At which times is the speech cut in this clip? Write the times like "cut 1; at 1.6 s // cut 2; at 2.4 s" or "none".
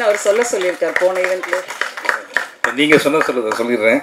none